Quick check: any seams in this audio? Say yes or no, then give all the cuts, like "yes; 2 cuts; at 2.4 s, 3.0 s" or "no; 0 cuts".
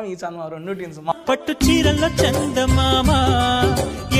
yes; 1 cut; at 1.1 s